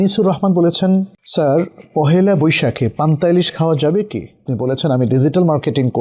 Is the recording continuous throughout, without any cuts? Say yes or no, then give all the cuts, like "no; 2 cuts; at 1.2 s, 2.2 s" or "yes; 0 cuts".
no; 2 cuts; at 1.2 s, 4.5 s